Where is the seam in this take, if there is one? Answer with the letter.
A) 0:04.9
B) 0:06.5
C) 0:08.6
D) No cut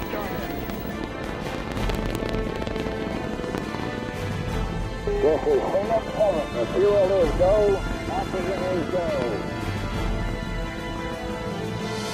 C